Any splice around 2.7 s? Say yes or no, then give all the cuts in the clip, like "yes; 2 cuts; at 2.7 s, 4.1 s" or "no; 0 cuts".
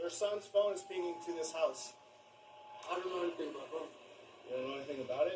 yes; 1 cut; at 2.7 s